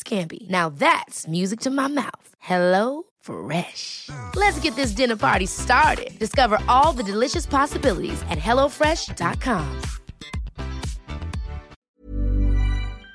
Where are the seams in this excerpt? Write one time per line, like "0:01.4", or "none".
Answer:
0:11.8